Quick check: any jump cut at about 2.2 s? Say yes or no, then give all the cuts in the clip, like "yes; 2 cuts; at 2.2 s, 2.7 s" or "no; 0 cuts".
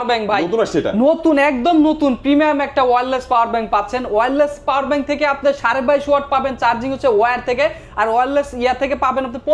no; 0 cuts